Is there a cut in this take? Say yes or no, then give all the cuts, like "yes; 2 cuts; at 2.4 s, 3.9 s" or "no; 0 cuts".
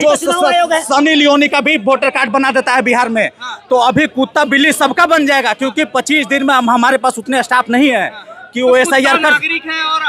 no; 0 cuts